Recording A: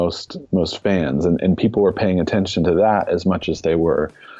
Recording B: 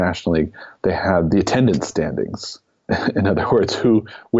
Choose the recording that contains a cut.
B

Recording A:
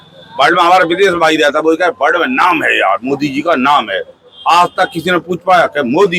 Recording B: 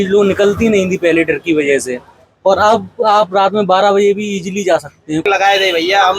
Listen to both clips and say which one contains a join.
B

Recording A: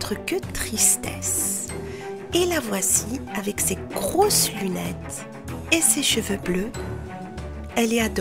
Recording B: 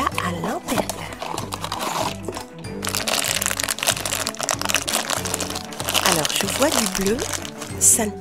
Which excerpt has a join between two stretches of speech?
A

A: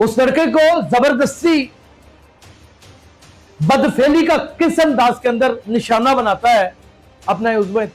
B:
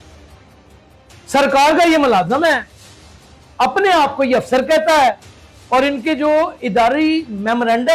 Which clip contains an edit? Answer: A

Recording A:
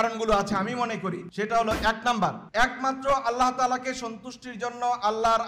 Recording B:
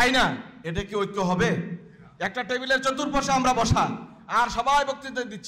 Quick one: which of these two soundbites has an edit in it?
A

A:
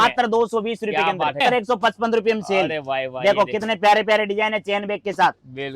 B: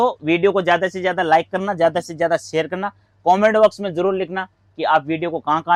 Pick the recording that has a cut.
A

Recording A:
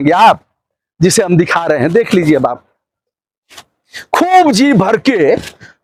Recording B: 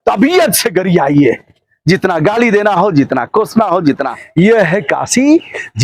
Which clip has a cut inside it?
B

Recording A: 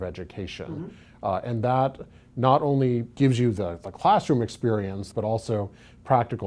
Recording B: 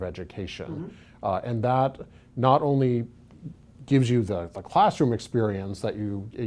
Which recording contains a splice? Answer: A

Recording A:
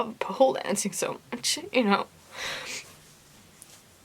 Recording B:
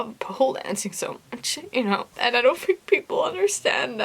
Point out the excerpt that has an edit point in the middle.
B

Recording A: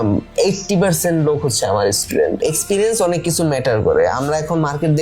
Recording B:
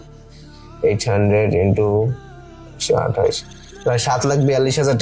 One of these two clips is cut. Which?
A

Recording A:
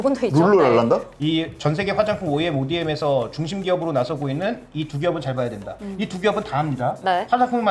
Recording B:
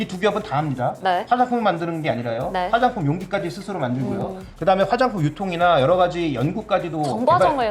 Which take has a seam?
A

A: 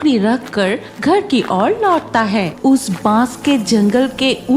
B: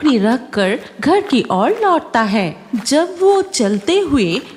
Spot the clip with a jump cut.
A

